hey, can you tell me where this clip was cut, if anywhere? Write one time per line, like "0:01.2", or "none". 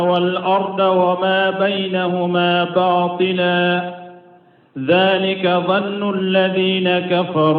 none

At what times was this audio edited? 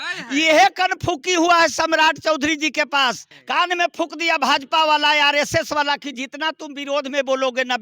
0:03.3

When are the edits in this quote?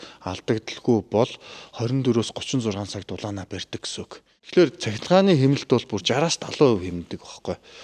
0:04.3

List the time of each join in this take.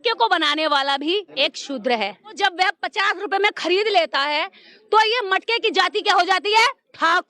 0:01.3
0:02.4

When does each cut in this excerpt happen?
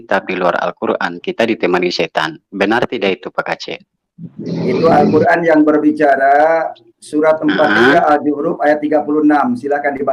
none

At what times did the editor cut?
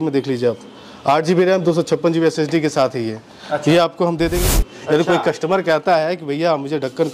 0:04.4

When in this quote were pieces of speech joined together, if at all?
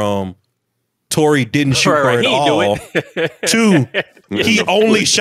0:04.2

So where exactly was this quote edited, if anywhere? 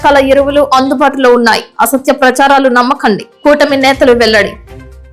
none

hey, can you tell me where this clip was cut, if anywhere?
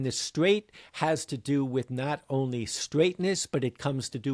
none

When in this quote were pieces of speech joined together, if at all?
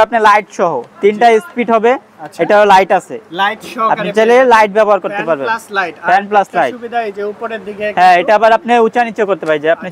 none

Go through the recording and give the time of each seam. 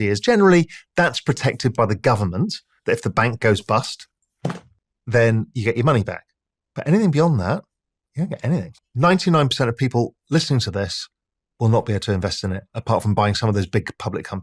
0:08.8

